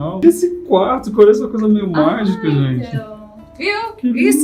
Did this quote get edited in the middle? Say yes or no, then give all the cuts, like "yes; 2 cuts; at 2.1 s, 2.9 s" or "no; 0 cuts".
no; 0 cuts